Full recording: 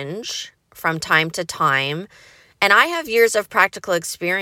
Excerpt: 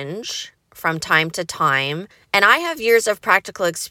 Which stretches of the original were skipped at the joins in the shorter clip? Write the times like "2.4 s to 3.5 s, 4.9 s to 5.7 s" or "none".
2.1 s to 2.4 s